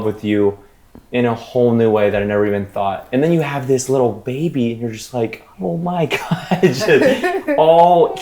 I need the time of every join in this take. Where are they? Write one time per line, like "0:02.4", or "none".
0:05.4